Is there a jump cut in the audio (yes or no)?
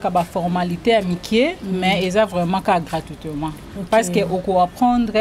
no